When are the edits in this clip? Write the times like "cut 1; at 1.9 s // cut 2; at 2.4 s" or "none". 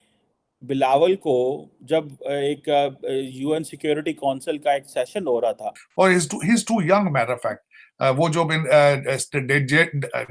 cut 1; at 5.8 s